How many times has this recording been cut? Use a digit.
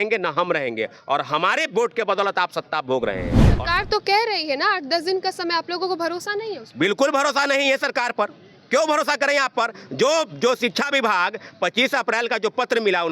1